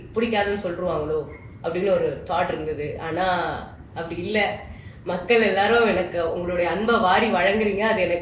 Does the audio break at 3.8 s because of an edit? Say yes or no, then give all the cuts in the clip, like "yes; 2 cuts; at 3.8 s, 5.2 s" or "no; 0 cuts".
no; 0 cuts